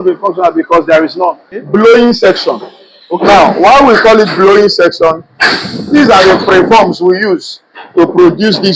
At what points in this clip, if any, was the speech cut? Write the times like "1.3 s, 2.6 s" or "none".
1.6 s